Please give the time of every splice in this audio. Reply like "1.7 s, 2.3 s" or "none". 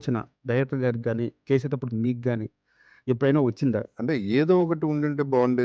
3.8 s